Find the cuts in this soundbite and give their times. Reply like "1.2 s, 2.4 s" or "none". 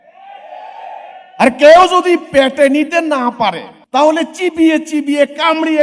3.7 s